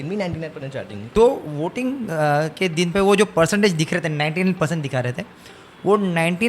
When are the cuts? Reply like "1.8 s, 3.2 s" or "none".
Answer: 1.0 s

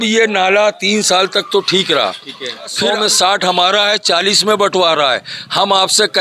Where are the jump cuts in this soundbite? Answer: 2.8 s

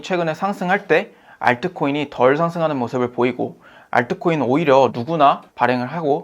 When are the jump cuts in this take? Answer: 5.0 s

